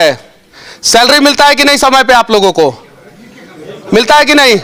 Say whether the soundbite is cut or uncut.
uncut